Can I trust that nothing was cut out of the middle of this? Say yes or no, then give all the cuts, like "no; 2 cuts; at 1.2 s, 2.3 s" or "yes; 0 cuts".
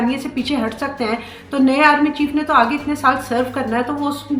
yes; 0 cuts